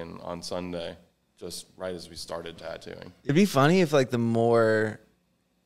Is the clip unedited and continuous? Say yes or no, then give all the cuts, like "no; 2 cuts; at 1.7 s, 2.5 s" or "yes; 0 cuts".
no; 1 cut; at 3.2 s